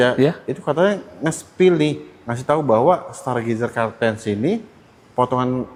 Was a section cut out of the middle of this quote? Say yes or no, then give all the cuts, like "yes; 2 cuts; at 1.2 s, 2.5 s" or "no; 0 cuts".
no; 0 cuts